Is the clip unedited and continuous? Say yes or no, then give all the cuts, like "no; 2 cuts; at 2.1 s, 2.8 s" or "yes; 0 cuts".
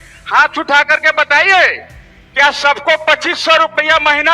yes; 0 cuts